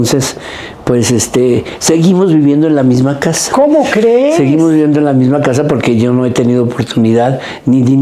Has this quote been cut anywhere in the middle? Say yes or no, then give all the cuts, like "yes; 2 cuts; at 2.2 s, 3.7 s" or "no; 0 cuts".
no; 0 cuts